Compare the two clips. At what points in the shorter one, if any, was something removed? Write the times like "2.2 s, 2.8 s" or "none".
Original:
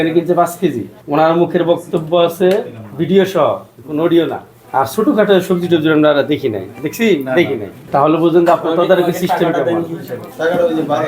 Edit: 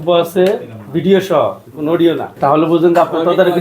1.9 s